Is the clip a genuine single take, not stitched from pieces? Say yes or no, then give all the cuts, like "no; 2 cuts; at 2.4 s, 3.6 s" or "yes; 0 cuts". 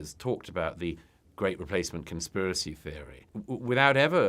no; 1 cut; at 3.3 s